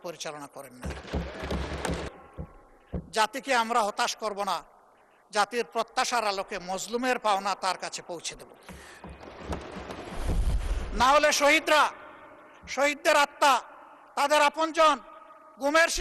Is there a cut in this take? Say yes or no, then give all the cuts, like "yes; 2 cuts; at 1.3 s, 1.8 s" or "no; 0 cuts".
yes; 1 cut; at 2.1 s